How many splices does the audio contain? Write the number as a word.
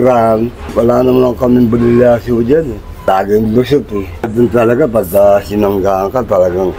one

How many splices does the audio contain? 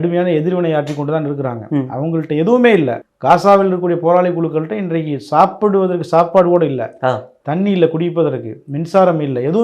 one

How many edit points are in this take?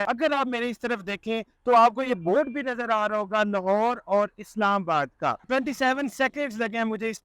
one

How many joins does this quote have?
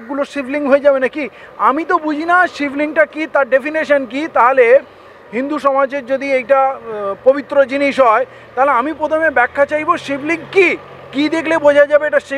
zero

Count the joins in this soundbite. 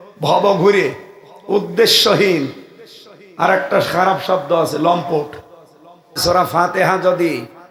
one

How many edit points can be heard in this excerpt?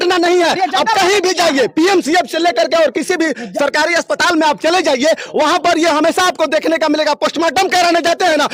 zero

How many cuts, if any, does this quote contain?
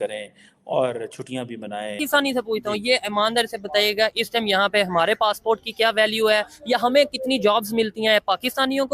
one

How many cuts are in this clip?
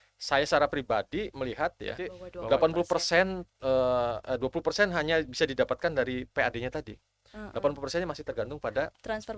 one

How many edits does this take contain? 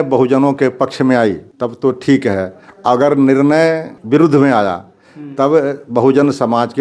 two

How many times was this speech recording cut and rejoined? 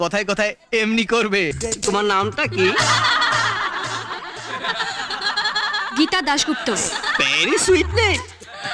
one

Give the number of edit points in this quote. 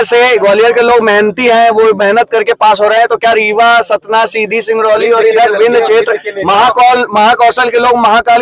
zero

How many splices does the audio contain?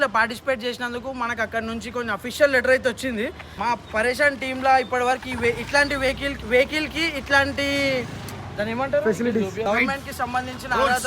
two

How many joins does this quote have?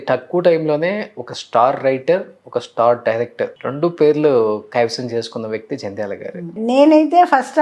two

